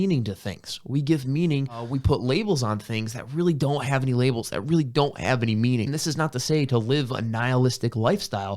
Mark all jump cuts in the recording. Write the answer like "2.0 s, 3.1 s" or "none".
1.9 s, 5.9 s